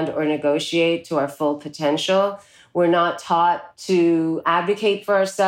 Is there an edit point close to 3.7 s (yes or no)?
yes